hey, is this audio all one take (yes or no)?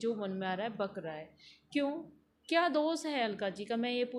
yes